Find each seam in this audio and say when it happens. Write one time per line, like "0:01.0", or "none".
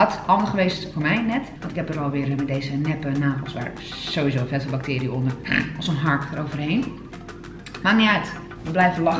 0:01.6
0:05.4